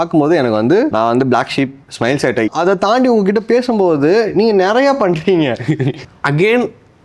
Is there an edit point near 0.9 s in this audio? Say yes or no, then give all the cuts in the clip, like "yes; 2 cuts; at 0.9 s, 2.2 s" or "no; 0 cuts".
yes; 3 cuts; at 0.9 s, 2.5 s, 6.0 s